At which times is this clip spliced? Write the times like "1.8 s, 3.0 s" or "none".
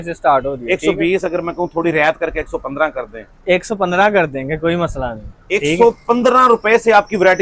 none